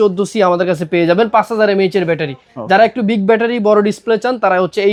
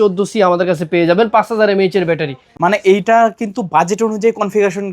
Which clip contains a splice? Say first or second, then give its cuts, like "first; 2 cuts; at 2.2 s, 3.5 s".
second; 1 cut; at 2.5 s